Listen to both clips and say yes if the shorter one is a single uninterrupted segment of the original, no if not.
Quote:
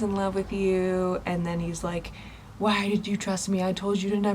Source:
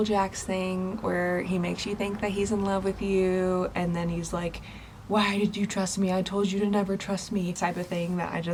yes